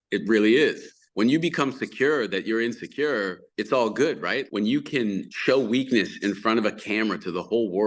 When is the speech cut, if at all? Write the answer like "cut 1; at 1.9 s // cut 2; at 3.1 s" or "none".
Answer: cut 1; at 1.0 s // cut 2; at 3.5 s // cut 3; at 4.5 s // cut 4; at 5.3 s